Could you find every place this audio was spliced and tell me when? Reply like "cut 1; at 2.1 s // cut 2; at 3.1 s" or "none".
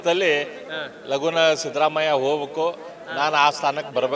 none